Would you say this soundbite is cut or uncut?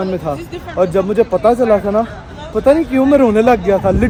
uncut